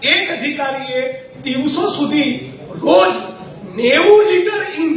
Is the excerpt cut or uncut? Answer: uncut